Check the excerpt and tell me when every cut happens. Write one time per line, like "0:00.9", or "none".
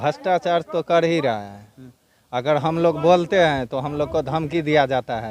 none